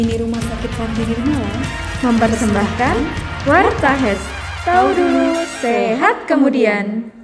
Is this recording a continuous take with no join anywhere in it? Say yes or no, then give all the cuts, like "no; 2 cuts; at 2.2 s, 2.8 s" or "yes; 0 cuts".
yes; 0 cuts